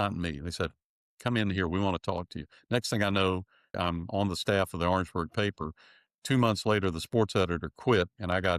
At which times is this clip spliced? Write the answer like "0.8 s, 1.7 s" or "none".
3.8 s